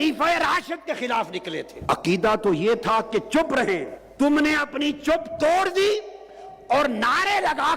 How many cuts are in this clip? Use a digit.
2